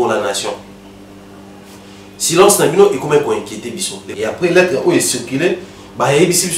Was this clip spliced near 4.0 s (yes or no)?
yes